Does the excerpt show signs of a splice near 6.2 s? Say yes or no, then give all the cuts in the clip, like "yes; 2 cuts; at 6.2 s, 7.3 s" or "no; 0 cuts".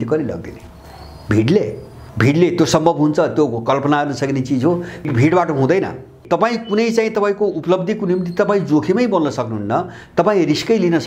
yes; 3 cuts; at 2.0 s, 5.1 s, 6.2 s